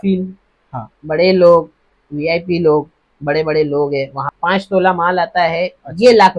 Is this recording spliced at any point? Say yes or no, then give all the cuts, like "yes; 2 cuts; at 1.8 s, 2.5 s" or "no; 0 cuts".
yes; 1 cut; at 4.2 s